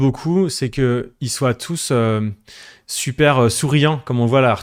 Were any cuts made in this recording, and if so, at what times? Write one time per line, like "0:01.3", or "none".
none

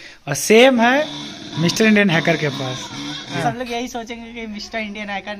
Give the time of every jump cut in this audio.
0:03.4

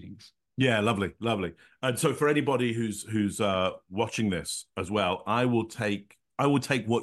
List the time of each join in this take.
none

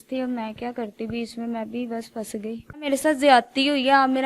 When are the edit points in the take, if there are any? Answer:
0:02.9

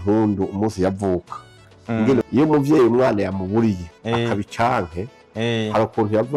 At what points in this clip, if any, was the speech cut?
0:02.2

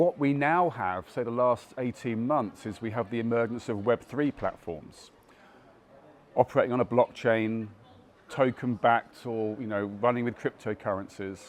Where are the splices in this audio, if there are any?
none

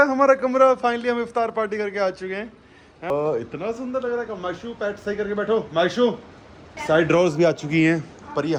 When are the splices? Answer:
none

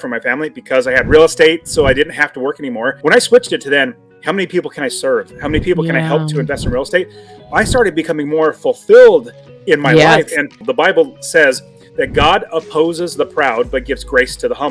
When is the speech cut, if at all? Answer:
0:03.0
0:10.6

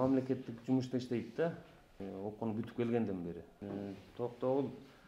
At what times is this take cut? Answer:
0:02.0
0:03.6

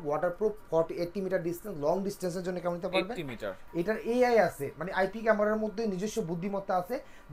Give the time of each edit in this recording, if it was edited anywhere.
0:03.6

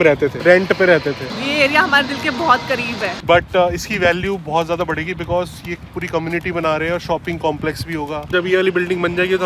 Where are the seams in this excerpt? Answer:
0:01.3
0:03.1
0:08.3

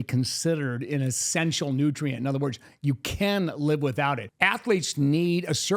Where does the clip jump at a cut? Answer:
0:04.3

